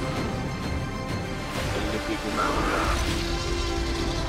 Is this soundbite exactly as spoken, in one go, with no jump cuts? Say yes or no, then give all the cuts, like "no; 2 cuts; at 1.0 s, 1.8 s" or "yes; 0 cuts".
yes; 0 cuts